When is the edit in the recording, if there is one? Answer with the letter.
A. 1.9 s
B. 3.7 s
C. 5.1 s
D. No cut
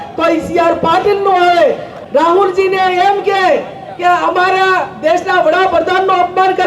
A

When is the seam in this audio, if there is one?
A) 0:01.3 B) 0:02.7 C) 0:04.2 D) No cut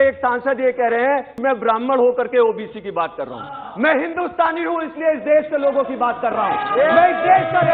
A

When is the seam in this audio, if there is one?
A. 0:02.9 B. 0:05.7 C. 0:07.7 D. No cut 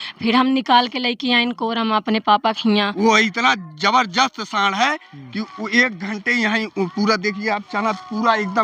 A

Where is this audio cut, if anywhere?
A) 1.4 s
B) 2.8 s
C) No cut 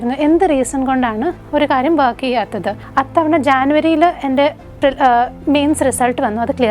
B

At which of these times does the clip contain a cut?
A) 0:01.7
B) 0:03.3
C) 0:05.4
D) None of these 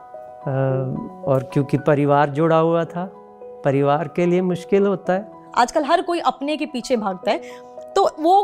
C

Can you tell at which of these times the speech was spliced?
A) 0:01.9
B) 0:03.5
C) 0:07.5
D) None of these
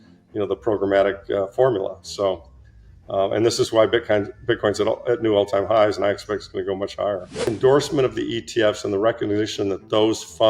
C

